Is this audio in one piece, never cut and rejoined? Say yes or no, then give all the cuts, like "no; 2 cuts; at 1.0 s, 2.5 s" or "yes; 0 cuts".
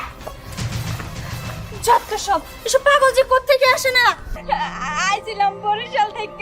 no; 1 cut; at 4.4 s